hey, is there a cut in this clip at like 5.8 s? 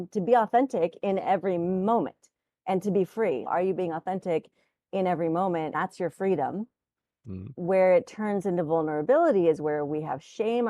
yes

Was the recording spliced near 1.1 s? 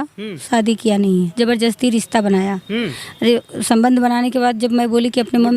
yes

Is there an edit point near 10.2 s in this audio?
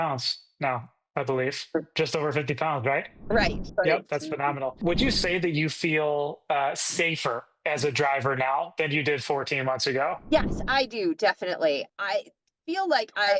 yes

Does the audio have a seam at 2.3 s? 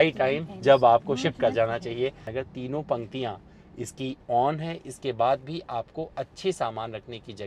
yes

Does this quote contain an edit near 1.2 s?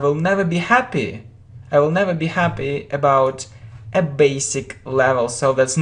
yes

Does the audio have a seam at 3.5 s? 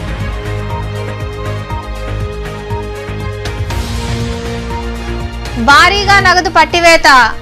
yes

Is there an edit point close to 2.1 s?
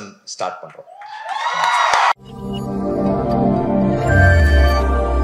yes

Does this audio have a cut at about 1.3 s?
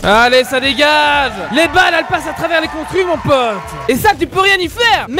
no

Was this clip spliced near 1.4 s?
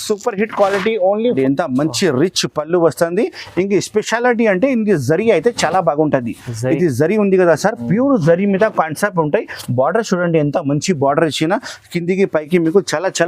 yes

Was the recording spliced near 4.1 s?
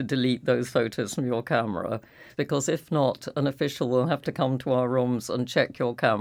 no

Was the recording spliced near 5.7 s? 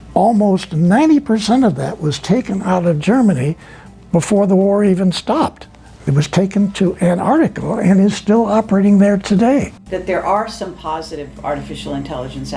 no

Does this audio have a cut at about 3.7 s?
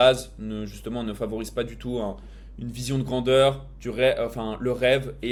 no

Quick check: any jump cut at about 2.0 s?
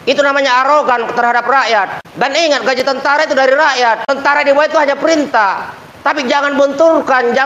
yes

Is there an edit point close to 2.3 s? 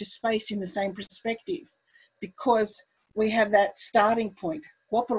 no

